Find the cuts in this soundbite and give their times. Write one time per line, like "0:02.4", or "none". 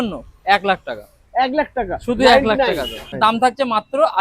0:03.2